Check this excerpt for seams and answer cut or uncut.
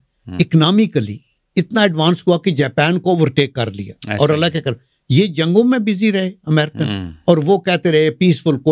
uncut